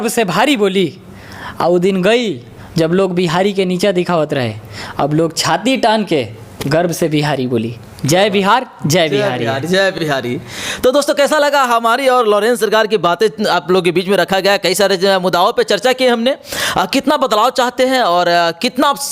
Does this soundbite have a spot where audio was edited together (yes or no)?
no